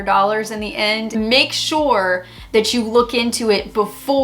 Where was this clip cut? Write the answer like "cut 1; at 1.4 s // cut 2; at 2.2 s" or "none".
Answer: cut 1; at 1.1 s